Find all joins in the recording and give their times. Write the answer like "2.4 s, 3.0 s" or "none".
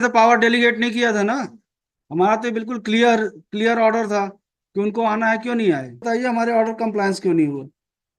6.0 s